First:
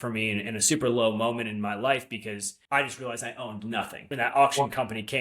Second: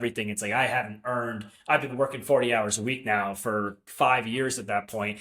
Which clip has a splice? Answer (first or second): first